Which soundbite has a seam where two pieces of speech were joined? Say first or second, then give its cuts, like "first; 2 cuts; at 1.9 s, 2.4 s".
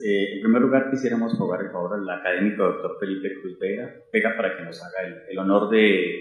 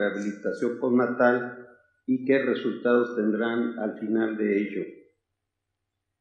first; 1 cut; at 1.8 s